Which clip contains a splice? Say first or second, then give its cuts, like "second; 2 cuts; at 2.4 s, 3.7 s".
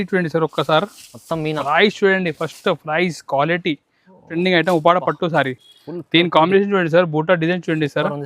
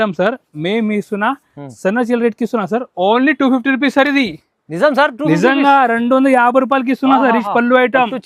first; 1 cut; at 4.3 s